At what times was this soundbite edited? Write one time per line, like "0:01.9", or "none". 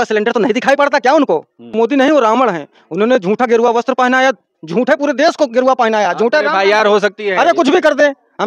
0:01.7